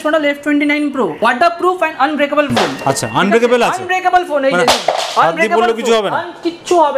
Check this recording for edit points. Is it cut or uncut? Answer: cut